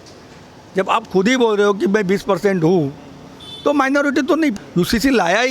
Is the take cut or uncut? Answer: cut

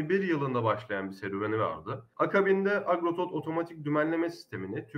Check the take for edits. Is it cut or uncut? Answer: cut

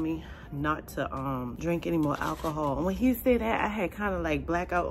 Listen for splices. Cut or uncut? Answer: cut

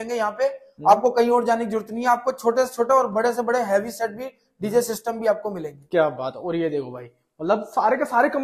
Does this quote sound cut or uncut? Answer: uncut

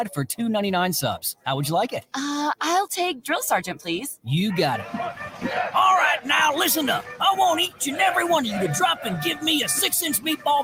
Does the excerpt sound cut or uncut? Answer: uncut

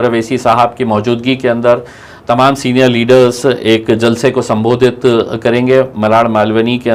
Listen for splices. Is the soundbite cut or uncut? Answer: uncut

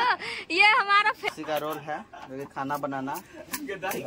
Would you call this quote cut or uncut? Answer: cut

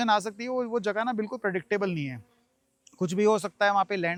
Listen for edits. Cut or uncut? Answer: uncut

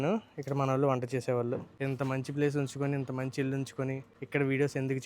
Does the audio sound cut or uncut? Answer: cut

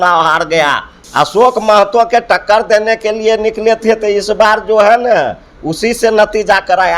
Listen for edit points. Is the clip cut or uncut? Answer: cut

